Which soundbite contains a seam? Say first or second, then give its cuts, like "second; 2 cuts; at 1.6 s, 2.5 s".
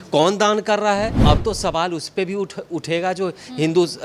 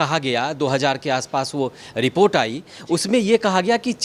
first; 1 cut; at 1.2 s